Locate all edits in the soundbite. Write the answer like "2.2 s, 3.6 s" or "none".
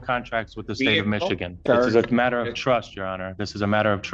1.5 s